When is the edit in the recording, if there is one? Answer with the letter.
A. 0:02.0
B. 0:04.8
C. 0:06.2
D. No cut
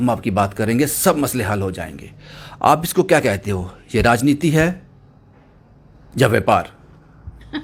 D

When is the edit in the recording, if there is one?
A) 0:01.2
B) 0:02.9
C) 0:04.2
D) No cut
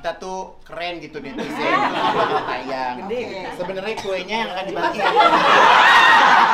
D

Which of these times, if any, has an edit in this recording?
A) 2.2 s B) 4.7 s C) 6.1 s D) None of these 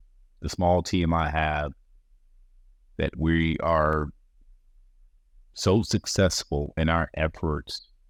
D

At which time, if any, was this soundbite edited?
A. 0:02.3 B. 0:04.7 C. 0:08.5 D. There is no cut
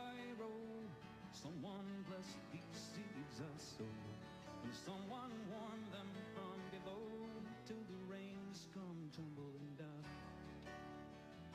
B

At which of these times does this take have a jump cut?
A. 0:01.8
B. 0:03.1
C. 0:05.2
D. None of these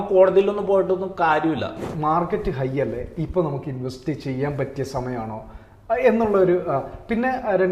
A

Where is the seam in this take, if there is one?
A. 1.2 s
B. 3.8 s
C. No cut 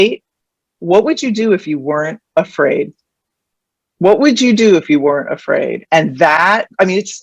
C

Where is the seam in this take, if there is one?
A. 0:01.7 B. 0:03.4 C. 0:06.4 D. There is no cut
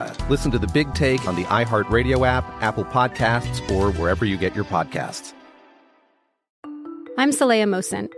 C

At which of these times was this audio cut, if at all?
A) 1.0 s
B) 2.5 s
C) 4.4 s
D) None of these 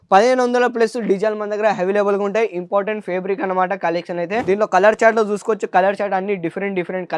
C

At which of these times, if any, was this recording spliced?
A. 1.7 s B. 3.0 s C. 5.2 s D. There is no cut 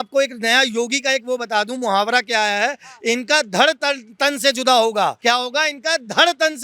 C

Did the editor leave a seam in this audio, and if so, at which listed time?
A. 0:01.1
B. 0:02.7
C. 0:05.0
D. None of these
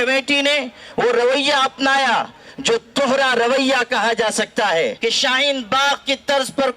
C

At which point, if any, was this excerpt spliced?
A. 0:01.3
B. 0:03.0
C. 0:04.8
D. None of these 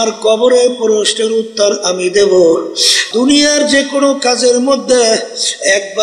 B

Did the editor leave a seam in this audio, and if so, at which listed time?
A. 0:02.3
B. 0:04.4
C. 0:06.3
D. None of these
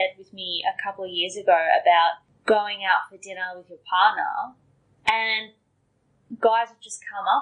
A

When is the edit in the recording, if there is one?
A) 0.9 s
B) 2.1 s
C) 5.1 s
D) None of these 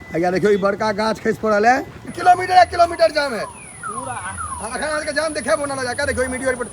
B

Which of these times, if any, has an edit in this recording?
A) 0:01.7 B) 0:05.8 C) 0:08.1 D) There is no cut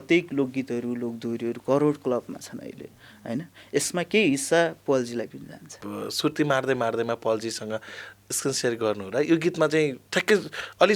B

